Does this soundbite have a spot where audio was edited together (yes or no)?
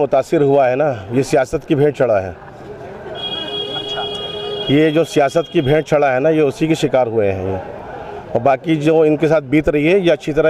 no